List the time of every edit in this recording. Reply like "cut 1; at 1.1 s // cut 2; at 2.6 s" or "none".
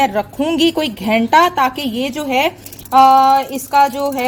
none